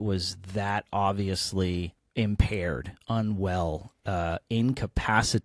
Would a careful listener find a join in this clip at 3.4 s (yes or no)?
no